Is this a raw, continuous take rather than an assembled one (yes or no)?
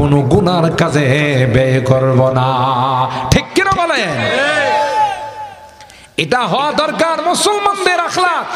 yes